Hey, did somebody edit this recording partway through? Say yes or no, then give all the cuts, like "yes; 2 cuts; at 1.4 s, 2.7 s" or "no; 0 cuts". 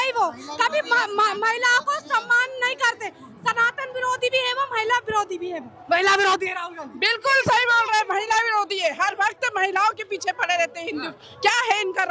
no; 0 cuts